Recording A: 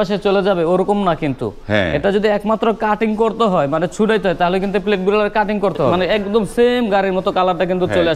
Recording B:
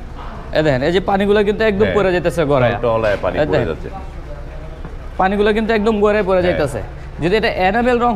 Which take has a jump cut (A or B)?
A